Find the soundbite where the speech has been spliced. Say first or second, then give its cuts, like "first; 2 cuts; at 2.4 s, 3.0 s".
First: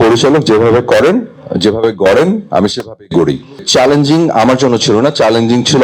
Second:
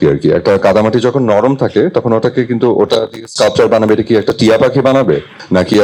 first; 1 cut; at 3.6 s